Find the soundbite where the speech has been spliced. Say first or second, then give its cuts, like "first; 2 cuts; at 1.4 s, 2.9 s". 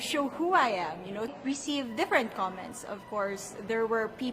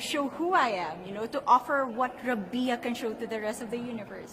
first; 1 cut; at 1.3 s